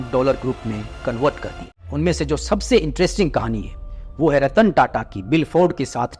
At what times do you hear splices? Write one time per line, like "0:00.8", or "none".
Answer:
0:01.7